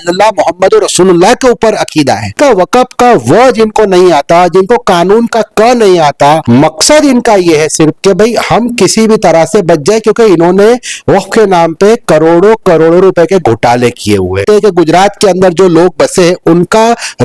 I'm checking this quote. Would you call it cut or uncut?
cut